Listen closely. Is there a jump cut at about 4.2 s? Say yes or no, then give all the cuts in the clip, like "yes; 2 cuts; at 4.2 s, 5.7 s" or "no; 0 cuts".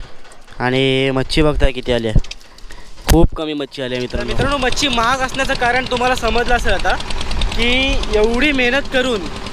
yes; 1 cut; at 4.2 s